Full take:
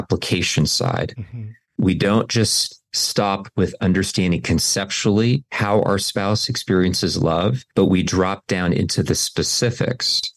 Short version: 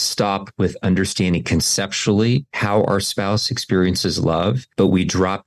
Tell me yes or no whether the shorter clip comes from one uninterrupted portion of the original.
yes